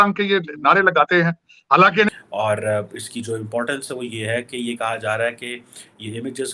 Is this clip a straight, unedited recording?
no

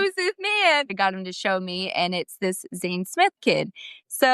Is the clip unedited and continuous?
no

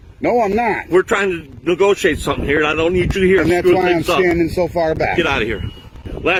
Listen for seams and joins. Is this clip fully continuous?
yes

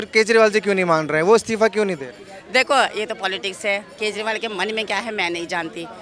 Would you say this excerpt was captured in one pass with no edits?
yes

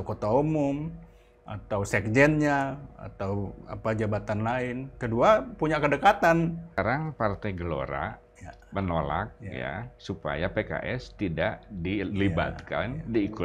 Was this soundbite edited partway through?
yes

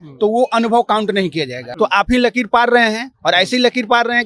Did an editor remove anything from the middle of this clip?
yes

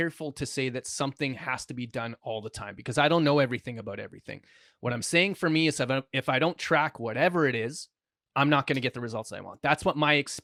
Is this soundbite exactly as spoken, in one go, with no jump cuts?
yes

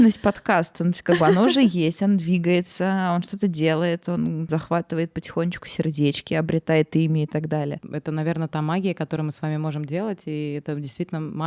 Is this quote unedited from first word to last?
no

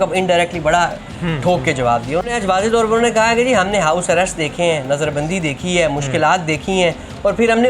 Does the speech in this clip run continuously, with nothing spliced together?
no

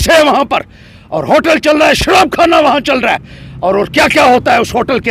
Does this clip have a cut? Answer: no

